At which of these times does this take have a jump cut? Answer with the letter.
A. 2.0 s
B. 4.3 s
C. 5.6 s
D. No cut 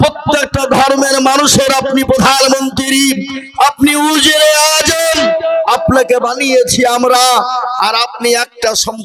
D